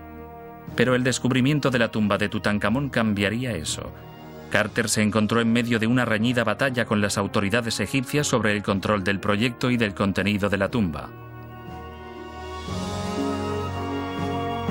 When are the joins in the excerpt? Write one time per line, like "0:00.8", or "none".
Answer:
0:10.6